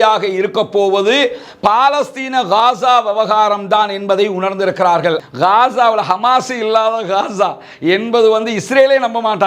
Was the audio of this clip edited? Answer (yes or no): yes